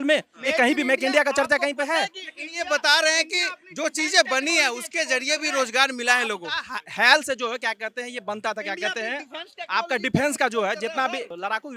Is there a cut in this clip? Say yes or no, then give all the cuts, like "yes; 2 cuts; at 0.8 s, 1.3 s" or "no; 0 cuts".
no; 0 cuts